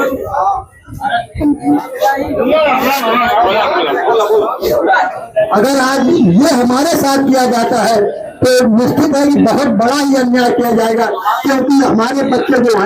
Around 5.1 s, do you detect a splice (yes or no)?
yes